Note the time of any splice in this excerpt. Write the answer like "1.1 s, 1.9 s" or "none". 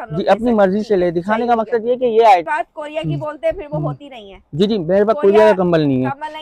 2.5 s